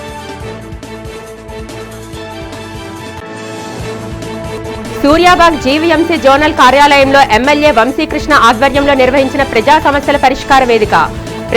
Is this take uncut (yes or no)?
no